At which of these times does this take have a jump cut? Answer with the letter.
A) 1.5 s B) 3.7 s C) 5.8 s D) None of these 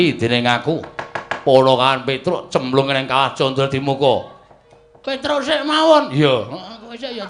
D